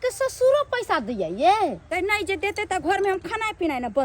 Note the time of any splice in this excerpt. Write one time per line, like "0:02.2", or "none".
0:01.9